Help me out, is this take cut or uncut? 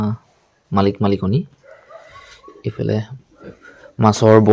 uncut